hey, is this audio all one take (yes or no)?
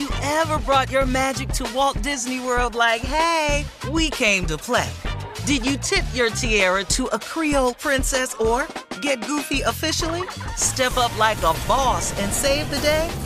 yes